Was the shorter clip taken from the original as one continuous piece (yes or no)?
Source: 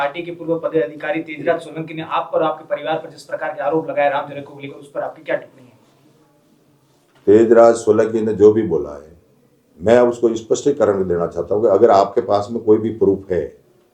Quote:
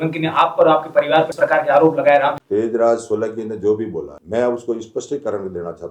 no